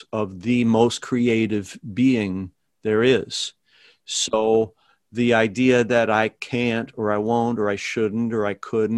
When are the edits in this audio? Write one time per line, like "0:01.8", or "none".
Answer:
none